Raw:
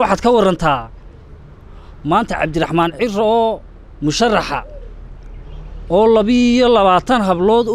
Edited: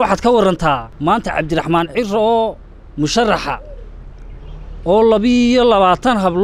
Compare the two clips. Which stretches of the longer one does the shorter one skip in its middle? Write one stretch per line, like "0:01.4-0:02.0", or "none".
0:00.9-0:01.9